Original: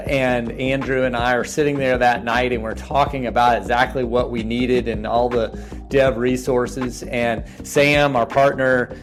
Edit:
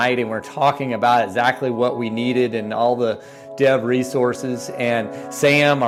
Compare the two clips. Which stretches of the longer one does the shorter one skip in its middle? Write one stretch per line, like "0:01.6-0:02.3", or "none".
none